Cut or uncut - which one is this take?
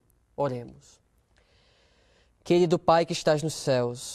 cut